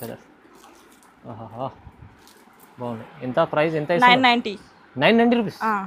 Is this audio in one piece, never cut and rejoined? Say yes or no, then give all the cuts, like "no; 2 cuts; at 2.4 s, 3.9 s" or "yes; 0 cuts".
yes; 0 cuts